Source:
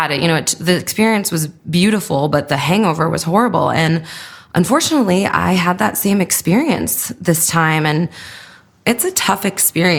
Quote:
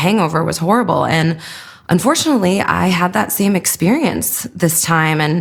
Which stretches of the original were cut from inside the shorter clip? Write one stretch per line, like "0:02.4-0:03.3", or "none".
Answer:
none

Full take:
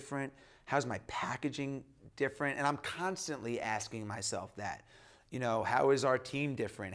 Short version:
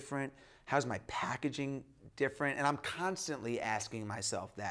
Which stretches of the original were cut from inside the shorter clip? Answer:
none

